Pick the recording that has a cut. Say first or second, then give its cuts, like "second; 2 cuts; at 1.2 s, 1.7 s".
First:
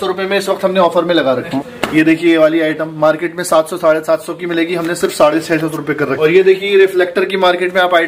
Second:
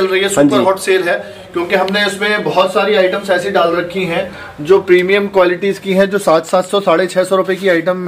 first; 2 cuts; at 1.5 s, 6.1 s